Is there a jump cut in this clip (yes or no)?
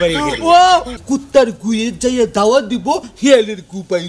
yes